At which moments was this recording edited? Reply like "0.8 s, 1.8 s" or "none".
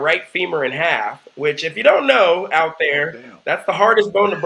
none